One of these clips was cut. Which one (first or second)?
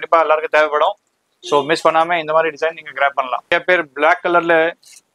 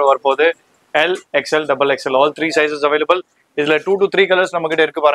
first